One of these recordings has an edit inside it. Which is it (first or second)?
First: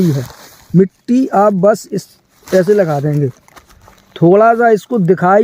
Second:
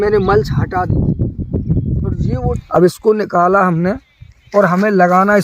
second